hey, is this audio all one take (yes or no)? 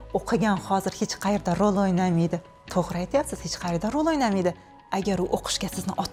yes